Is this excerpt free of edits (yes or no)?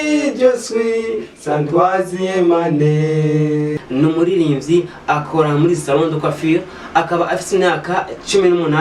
no